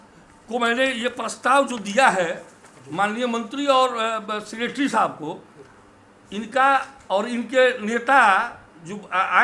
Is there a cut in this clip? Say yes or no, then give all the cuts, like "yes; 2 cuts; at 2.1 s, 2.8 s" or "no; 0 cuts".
no; 0 cuts